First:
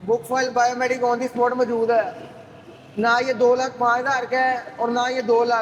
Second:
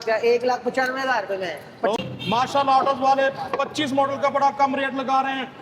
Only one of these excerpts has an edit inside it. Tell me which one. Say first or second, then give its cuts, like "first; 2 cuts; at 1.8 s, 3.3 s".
second; 1 cut; at 2.0 s